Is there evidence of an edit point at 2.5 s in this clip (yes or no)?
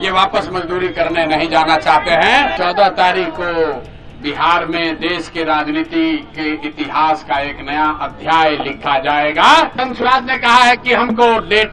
yes